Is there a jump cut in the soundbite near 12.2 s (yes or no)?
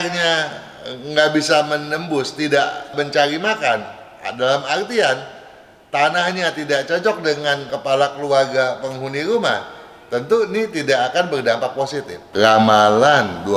yes